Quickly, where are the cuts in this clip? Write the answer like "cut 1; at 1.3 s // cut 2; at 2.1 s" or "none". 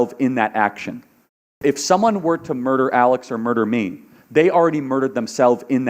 cut 1; at 1.5 s